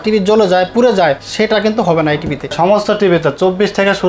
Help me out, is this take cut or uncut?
cut